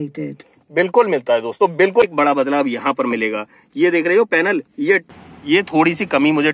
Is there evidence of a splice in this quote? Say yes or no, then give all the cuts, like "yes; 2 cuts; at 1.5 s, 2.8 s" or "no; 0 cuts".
yes; 2 cuts; at 2.1 s, 5.0 s